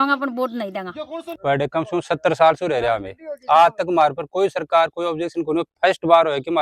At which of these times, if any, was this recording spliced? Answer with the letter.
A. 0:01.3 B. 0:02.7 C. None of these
A